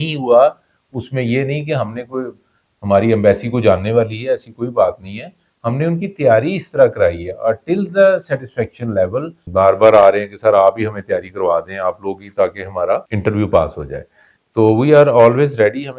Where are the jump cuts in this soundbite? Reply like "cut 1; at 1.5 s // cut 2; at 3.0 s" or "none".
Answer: cut 1; at 9.4 s